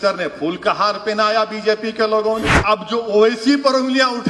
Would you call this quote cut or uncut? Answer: cut